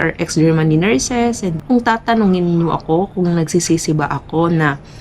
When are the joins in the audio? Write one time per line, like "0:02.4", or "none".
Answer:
0:01.5

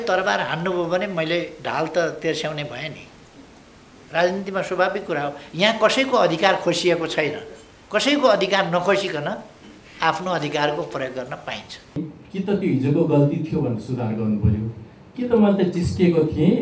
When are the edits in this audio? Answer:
0:12.0

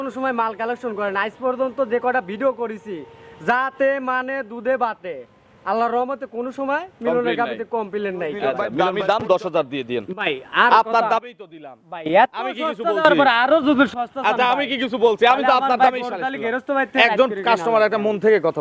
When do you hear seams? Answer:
0:09.0

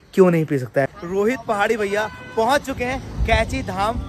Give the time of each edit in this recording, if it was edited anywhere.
0:00.9

